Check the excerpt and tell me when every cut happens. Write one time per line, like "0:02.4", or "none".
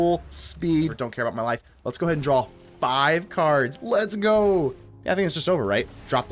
0:01.0
0:04.9